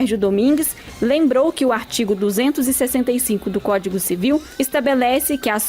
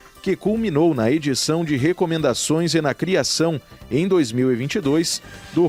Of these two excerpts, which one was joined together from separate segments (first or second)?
first